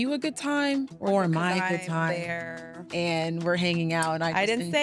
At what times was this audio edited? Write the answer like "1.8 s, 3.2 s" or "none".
0.9 s